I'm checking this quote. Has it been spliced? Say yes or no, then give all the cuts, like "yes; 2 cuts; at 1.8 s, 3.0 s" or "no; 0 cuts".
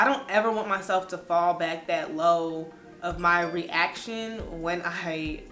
no; 0 cuts